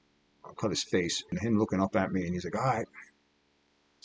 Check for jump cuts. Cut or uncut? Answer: cut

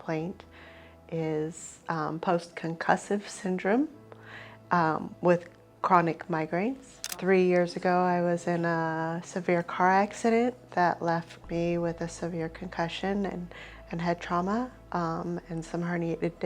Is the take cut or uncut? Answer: cut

